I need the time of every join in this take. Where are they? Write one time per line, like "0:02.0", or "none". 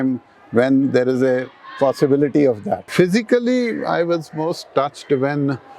0:02.9